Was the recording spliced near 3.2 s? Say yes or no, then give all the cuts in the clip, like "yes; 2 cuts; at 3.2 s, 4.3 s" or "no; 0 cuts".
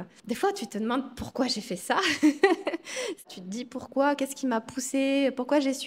yes; 1 cut; at 3.2 s